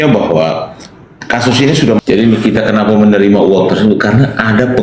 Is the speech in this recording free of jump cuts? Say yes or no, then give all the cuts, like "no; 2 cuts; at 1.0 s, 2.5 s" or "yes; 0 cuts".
no; 1 cut; at 1.7 s